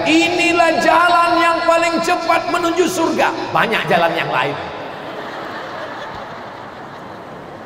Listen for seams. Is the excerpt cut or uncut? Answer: uncut